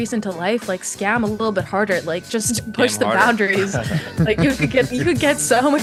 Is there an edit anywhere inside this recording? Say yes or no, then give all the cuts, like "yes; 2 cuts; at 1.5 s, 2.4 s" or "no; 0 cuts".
no; 0 cuts